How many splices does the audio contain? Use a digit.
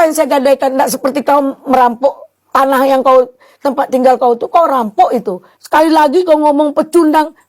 1